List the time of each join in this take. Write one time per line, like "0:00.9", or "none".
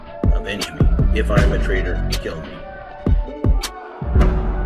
0:02.7